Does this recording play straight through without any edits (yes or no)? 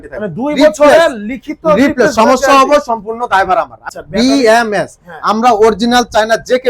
no